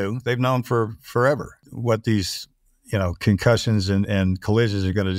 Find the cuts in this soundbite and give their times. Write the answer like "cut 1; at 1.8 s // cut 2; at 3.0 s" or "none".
cut 1; at 1.7 s

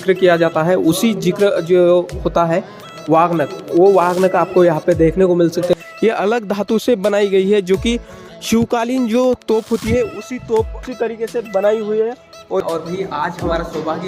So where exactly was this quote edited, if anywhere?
cut 1; at 5.7 s // cut 2; at 10.8 s // cut 3; at 12.6 s

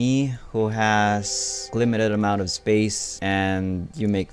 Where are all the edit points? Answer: cut 1; at 1.7 s

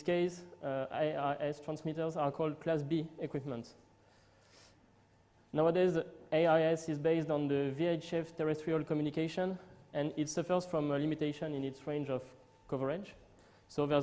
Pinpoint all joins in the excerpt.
none

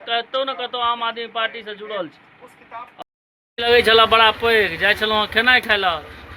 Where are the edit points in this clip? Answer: cut 1; at 3.0 s

